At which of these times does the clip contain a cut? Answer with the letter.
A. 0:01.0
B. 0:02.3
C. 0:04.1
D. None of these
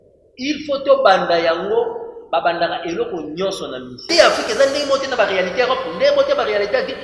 C